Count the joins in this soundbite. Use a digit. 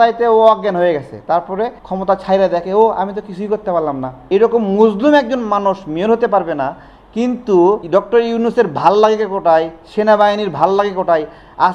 3